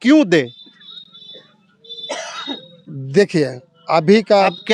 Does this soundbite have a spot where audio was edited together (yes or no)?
no